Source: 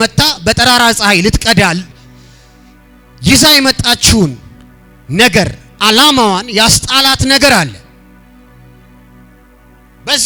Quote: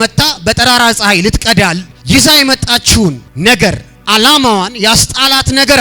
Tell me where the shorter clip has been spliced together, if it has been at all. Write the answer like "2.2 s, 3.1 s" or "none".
1.9 s, 3.3 s